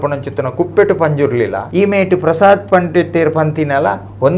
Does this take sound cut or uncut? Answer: cut